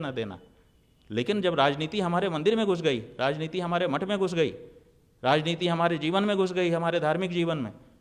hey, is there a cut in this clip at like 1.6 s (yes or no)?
no